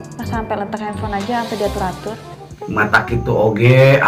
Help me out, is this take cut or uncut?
uncut